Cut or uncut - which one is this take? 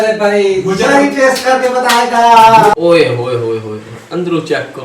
cut